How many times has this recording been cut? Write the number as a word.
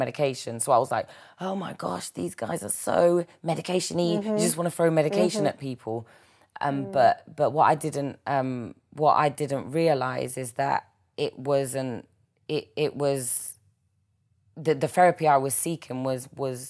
zero